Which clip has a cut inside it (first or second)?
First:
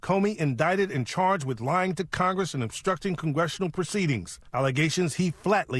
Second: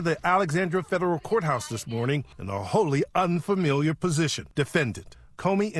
second